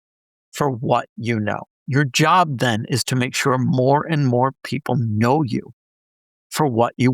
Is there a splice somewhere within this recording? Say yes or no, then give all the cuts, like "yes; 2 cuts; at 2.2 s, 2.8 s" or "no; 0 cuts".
yes; 1 cut; at 1.7 s